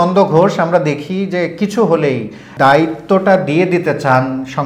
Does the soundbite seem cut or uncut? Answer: cut